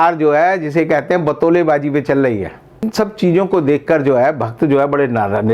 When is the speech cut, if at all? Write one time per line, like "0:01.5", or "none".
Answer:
0:02.8